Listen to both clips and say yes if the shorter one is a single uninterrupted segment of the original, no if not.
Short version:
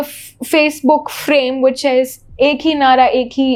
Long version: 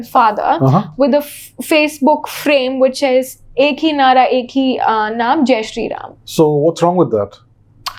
yes